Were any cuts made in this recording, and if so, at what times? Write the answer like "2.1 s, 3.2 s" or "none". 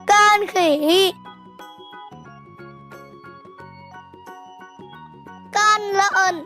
1.2 s, 3.3 s, 5.5 s